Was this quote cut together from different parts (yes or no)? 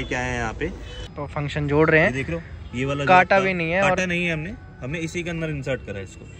yes